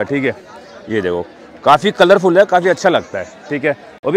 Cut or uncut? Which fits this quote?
uncut